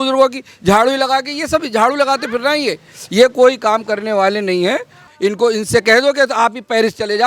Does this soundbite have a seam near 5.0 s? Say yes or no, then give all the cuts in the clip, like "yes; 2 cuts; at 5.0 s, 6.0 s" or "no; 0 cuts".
yes; 1 cut; at 5.0 s